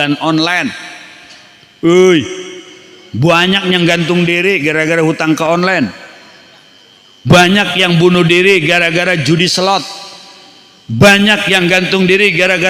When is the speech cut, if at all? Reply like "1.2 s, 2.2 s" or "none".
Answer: none

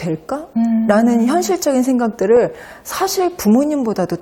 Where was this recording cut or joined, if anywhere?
none

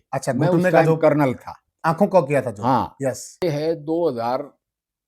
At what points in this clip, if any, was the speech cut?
3.4 s

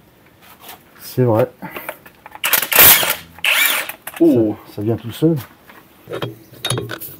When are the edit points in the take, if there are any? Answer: 6.1 s

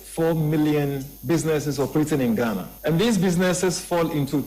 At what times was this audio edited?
1.1 s, 2.7 s

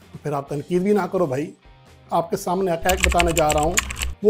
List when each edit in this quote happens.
2.0 s

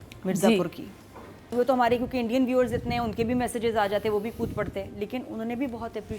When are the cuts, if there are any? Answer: 1.5 s

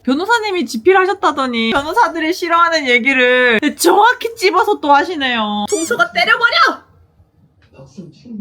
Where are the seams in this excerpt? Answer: 1.7 s, 3.6 s, 5.7 s

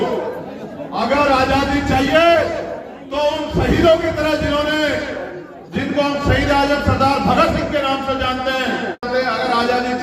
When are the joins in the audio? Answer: 9.0 s

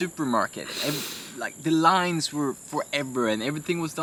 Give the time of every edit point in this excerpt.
none

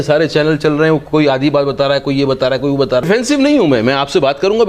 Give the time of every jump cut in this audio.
3.0 s

